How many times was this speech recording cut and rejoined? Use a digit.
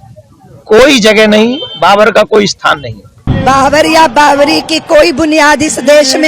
1